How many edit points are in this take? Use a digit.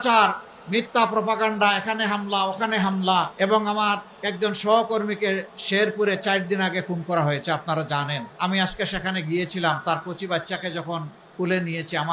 3